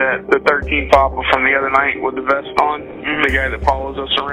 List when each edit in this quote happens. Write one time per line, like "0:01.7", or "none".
none

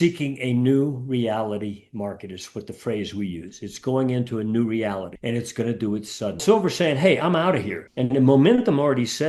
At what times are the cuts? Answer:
0:06.4

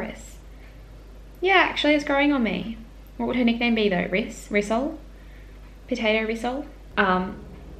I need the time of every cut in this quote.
0:06.8

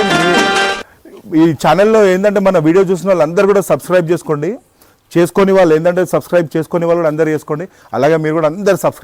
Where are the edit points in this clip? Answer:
none

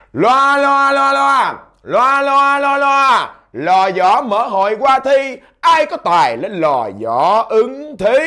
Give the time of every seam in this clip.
none

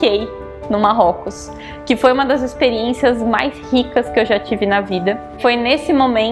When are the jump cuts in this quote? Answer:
none

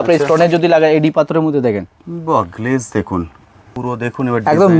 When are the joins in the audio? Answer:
0:03.7

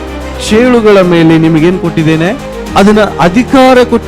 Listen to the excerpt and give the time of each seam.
0:02.5

